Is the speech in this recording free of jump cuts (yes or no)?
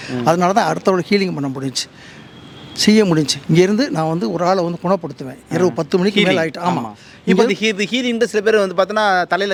yes